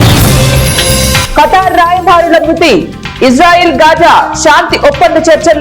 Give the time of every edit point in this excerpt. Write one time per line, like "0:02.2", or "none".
0:01.0

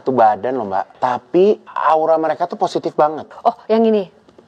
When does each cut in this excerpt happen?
0:00.9
0:01.7
0:03.2

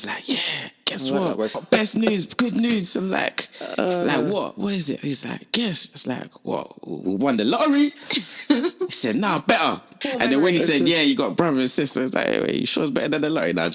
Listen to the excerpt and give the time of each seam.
0:01.6
0:10.0

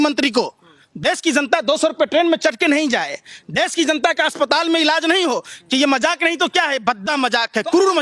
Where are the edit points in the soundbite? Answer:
none

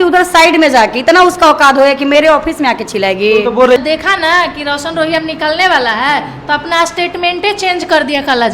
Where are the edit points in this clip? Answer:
0:03.8

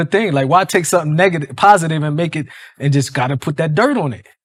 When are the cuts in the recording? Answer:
none

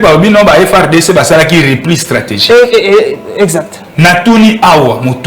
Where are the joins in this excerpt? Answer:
0:03.8

